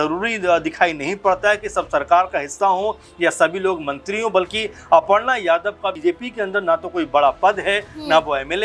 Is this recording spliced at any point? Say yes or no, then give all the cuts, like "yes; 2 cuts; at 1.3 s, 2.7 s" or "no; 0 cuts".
yes; 1 cut; at 6.0 s